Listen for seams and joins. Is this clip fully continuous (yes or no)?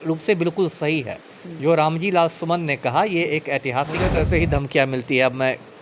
no